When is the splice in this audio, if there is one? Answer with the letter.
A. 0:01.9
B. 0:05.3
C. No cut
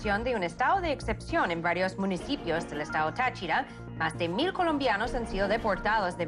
A